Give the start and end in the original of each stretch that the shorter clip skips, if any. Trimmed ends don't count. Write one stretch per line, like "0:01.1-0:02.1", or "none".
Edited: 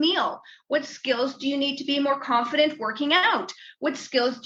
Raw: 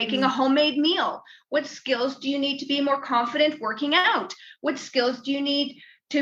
none